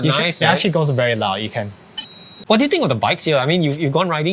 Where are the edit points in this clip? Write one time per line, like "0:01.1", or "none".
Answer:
0:02.4